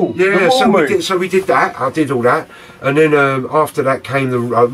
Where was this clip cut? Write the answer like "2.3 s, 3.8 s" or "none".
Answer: none

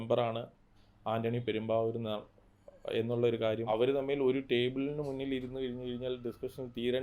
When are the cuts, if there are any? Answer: 3.7 s

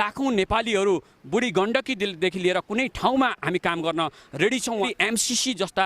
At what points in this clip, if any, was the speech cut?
4.9 s

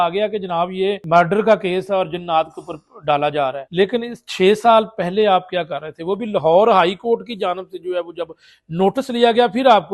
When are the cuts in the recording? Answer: 1.0 s, 3.6 s

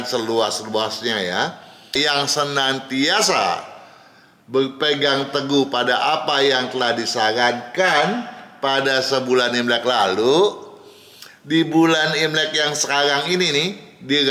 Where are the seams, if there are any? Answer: 1.8 s

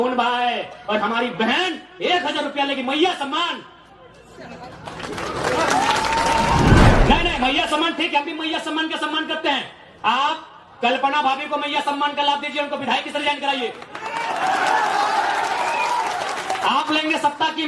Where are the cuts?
6.9 s

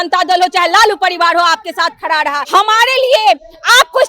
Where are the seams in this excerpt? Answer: 2.4 s

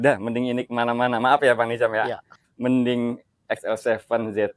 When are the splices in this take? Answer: 2.4 s

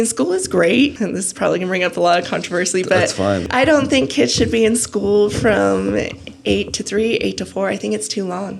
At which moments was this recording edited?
1.0 s, 3.4 s

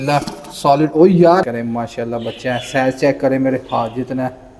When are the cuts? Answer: 1.4 s

